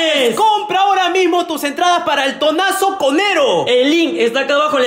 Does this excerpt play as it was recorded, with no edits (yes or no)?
yes